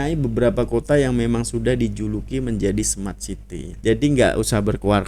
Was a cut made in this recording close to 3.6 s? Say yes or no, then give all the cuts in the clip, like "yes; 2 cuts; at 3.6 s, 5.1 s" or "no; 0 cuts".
yes; 1 cut; at 3.6 s